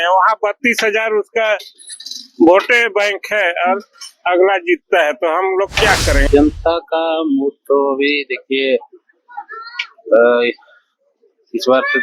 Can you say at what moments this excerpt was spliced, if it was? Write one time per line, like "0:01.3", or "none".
0:06.2